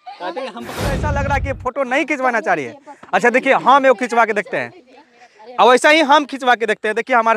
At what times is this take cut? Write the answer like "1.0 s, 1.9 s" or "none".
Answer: 1.0 s